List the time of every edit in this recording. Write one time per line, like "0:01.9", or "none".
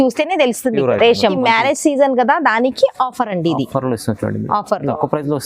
0:01.4

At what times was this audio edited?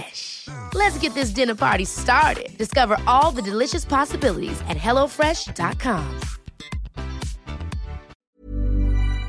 0:08.1

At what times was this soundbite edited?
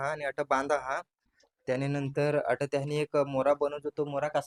none

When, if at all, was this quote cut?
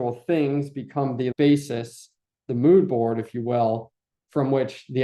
none

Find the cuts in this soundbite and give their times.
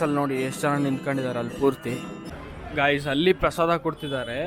0:02.3

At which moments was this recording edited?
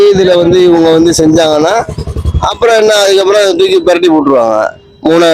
none

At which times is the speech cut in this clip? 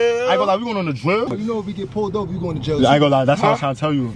0:01.3

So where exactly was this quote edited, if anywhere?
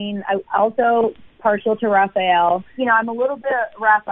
0:02.7

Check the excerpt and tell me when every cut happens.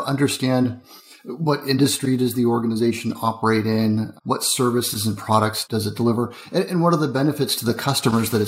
0:05.6

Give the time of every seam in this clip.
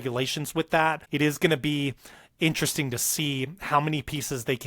0:01.0

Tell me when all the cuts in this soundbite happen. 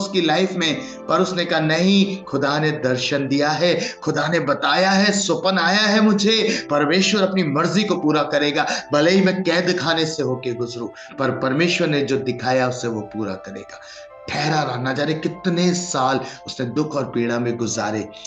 none

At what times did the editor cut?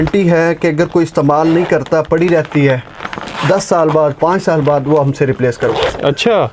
none

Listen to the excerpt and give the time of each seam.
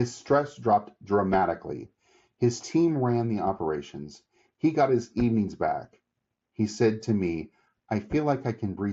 none

